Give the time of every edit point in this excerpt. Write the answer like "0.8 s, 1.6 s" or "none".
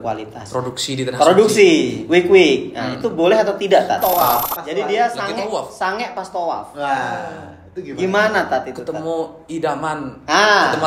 4.0 s

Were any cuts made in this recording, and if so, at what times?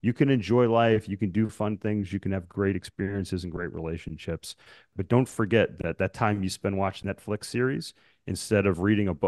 4.9 s, 7.0 s

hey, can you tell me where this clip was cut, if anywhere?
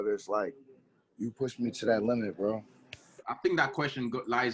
3.3 s

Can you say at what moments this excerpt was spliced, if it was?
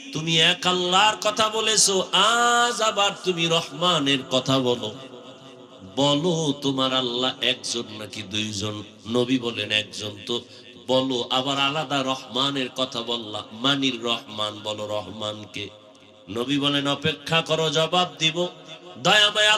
none

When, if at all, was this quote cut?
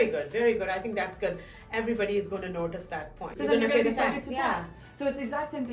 3.3 s

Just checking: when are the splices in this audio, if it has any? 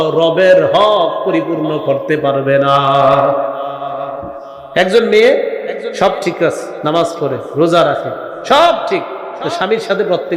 none

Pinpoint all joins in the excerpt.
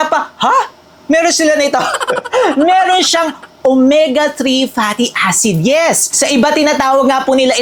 none

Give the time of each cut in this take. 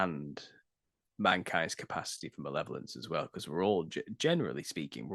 none

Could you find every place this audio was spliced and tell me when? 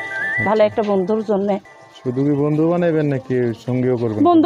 1.7 s

